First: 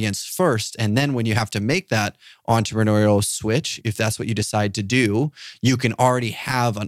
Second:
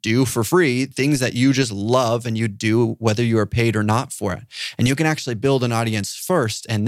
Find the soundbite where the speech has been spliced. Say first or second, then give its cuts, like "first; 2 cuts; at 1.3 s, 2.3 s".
first; 1 cut; at 3.7 s